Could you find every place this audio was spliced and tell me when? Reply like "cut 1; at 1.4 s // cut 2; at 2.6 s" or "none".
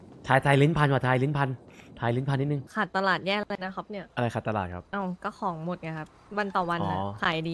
cut 1; at 2.7 s // cut 2; at 4.1 s // cut 3; at 4.8 s // cut 4; at 6.1 s